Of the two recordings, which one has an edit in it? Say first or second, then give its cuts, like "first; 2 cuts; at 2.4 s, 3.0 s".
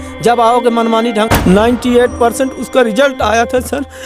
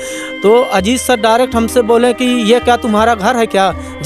first; 1 cut; at 1.3 s